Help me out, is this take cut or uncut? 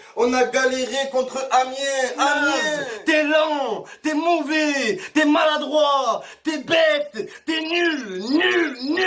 cut